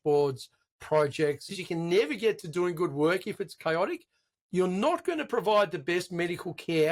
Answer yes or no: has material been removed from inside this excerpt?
yes